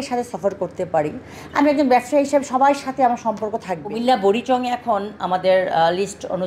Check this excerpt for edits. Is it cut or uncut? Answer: cut